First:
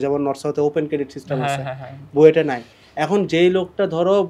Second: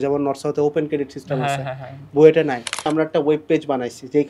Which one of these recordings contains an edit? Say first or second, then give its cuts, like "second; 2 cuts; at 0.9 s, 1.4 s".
second; 1 cut; at 2.9 s